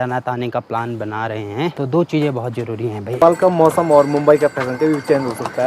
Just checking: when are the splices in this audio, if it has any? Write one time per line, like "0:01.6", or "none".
0:03.2